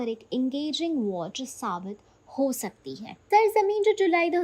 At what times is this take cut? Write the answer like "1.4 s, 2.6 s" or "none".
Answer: 3.1 s